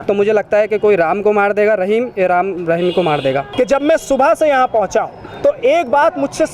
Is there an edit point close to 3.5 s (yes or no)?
yes